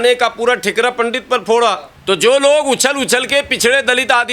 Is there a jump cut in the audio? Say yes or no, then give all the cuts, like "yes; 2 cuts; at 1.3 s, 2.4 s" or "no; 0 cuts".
yes; 1 cut; at 1.9 s